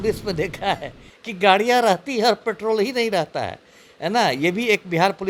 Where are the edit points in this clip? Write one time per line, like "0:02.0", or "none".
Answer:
none